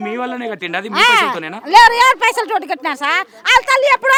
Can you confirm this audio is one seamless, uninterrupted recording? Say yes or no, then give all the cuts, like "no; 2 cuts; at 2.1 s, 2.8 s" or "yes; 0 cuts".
yes; 0 cuts